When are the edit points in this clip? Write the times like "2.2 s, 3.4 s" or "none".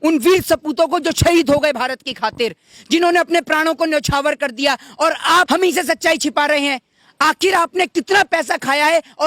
5.5 s

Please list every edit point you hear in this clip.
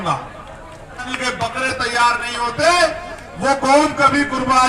1.2 s

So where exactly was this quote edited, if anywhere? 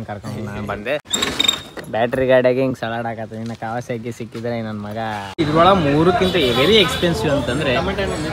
1.0 s, 5.4 s

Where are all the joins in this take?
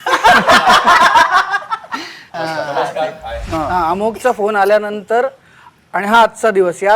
2.3 s, 3.5 s

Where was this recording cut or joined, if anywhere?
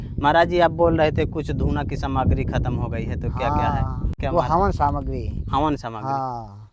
none

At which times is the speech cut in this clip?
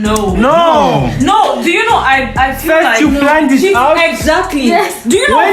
none

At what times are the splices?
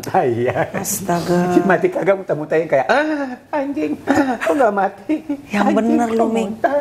none

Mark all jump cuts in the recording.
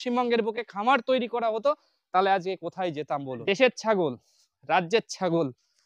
3.3 s

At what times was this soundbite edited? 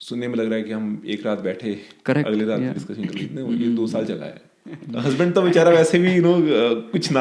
4.9 s

